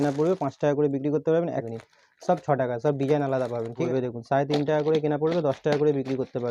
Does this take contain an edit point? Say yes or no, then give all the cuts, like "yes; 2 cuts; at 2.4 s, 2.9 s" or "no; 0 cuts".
yes; 2 cuts; at 1.6 s, 3.8 s